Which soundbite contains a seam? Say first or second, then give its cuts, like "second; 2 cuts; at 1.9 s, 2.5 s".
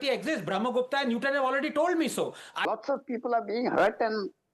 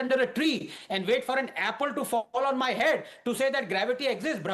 first; 1 cut; at 2.6 s